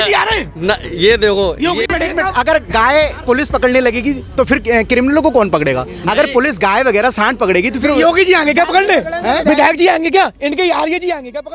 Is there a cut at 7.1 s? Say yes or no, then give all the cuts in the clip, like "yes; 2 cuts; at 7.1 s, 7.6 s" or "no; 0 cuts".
no; 1 cut; at 1.9 s